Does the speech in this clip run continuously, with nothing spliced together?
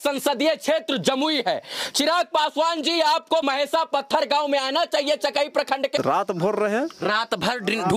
no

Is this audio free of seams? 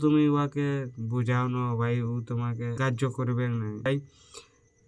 no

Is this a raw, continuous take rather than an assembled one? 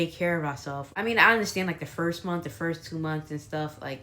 no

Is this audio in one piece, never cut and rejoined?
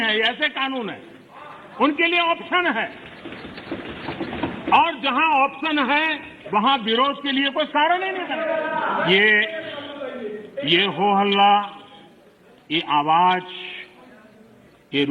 no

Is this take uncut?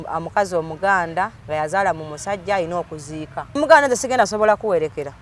no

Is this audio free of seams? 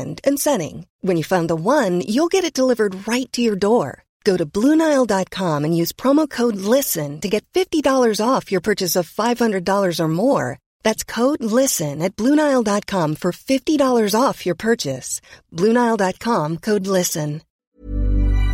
no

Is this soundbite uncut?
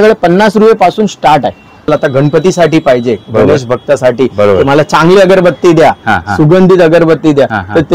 no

